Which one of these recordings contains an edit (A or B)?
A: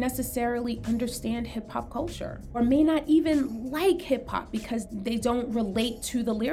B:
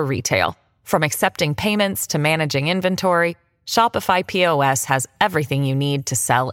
A